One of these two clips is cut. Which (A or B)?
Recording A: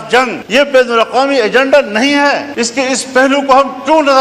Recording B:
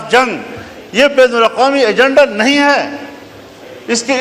A